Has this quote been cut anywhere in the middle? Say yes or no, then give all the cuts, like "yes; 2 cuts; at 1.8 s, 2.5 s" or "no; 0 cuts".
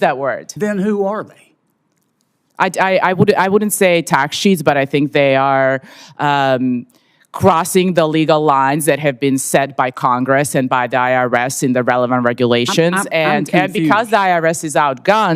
no; 0 cuts